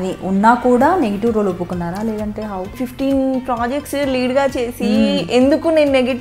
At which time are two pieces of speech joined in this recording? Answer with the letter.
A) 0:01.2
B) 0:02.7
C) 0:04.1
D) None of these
B